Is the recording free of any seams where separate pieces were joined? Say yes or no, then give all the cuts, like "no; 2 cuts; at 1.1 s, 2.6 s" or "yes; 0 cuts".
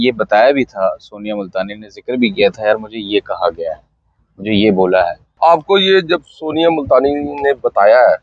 no; 1 cut; at 5.4 s